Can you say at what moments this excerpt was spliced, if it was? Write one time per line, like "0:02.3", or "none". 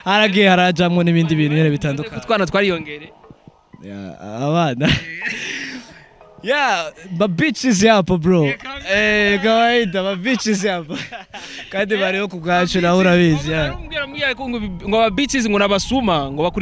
none